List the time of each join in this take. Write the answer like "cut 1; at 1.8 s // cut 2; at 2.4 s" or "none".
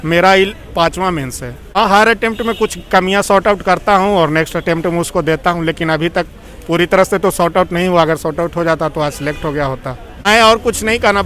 cut 1; at 1.6 s // cut 2; at 10.3 s